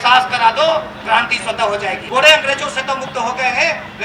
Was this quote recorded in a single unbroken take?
no; 1 cut; at 2.0 s

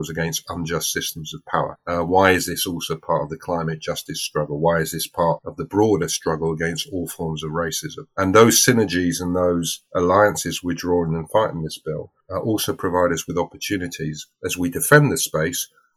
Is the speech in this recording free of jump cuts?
yes; 0 cuts

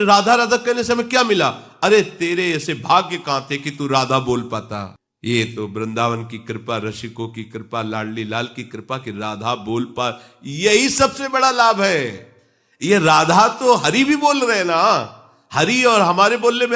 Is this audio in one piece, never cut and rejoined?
yes; 0 cuts

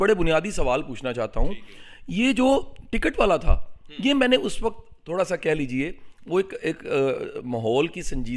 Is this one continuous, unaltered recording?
yes; 0 cuts

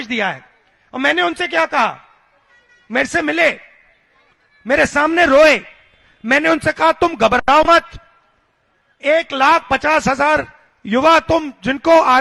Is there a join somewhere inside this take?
no; 0 cuts

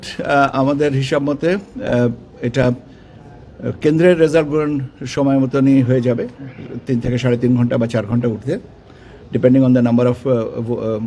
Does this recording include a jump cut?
no; 0 cuts

